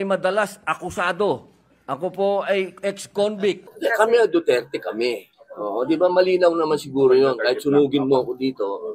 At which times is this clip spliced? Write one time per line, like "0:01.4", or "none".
none